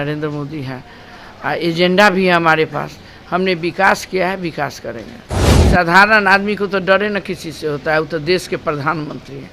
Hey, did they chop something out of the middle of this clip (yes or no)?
yes